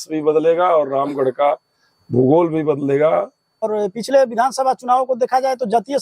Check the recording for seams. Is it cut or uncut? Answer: cut